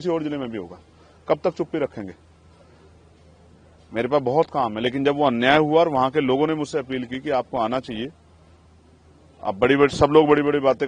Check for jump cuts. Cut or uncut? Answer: uncut